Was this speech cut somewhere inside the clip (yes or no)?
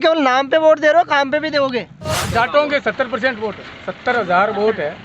yes